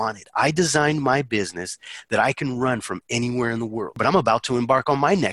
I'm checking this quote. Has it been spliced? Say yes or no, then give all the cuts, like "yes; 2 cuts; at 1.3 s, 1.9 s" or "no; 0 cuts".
yes; 1 cut; at 4.0 s